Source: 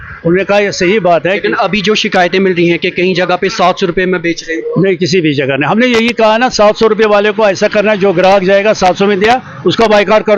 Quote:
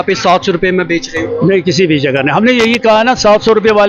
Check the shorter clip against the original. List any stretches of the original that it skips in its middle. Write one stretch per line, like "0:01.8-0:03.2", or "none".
none